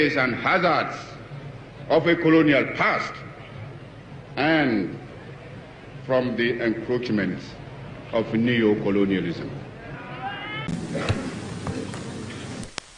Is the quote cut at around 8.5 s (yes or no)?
no